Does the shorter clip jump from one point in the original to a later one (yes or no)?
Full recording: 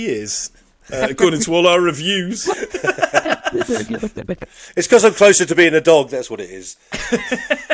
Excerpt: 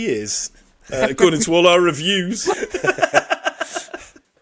no